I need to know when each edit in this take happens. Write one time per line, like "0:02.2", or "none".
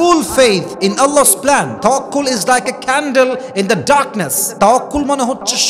0:01.7